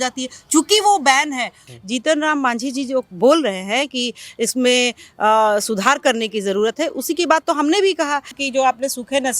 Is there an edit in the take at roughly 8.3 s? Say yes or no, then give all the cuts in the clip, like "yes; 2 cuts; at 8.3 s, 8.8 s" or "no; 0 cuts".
yes; 2 cuts; at 1.6 s, 8.3 s